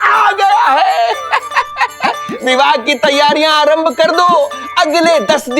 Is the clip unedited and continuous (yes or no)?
no